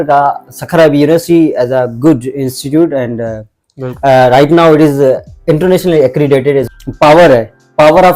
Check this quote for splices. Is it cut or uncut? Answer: cut